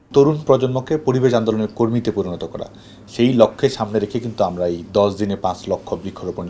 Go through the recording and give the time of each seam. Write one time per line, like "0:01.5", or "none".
none